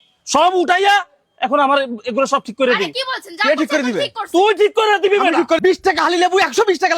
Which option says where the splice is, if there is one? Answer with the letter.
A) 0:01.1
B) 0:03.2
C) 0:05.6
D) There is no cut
C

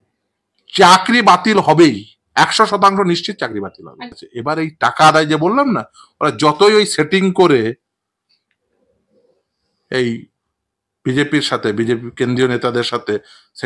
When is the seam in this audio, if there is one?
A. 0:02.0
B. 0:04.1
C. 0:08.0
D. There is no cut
B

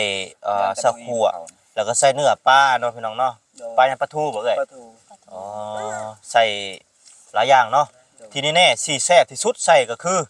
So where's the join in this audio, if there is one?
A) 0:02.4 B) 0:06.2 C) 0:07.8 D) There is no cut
D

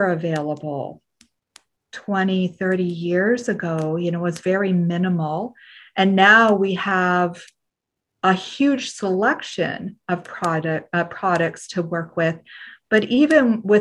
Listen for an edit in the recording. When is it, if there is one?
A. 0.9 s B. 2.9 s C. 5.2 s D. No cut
D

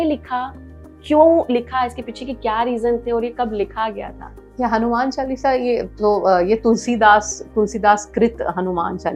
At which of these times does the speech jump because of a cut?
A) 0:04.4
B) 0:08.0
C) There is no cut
C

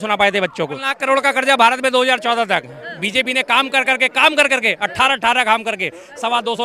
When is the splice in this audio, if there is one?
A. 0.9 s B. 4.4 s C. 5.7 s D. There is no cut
A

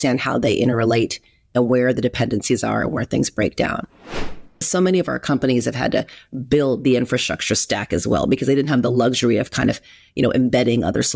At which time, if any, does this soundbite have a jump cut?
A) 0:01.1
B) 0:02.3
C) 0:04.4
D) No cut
C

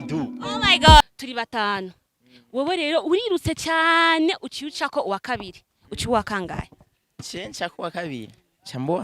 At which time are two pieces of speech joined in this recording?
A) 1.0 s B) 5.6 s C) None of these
A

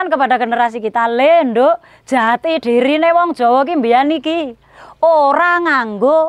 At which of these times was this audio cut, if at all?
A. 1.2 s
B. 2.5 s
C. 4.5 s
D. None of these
D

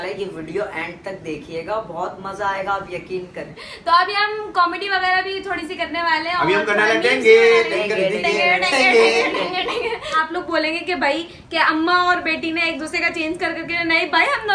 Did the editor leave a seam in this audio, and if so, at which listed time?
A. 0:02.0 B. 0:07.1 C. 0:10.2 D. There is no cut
C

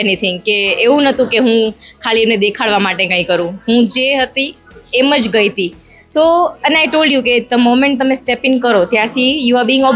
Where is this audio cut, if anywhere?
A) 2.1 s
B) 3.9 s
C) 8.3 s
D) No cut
D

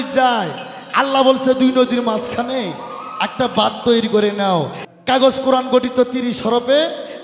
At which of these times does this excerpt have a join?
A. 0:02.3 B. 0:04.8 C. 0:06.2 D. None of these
B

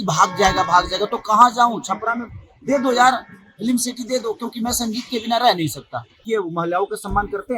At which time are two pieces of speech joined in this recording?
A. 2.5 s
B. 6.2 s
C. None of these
B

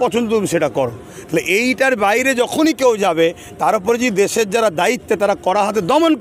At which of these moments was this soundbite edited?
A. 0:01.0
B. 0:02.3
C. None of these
C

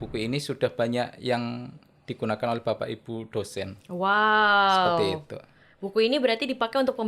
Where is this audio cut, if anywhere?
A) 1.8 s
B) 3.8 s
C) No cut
C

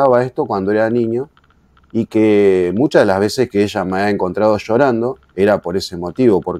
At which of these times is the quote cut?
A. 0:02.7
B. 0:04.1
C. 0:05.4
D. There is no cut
D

